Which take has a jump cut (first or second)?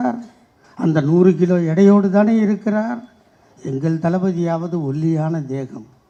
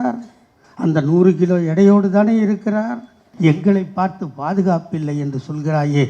second